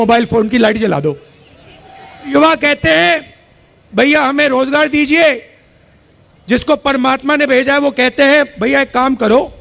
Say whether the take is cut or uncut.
cut